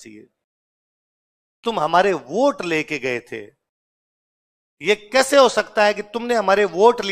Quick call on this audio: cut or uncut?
uncut